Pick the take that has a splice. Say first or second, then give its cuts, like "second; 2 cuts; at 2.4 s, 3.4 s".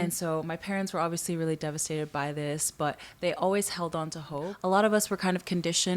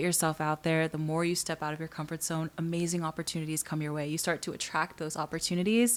first; 1 cut; at 4.5 s